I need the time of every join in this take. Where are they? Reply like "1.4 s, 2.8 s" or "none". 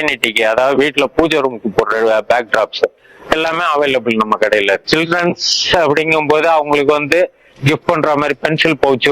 4.8 s